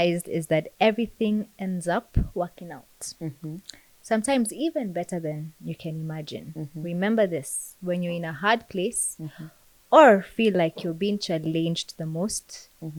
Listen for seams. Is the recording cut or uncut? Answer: uncut